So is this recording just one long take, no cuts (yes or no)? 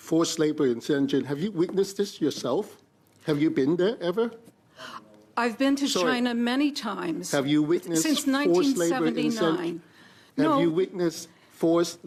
yes